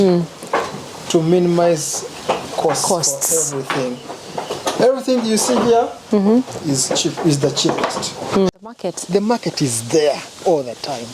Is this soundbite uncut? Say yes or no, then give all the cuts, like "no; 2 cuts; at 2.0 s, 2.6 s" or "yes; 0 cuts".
no; 1 cut; at 8.9 s